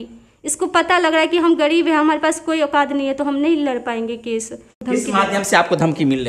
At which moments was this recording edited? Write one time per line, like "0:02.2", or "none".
0:04.8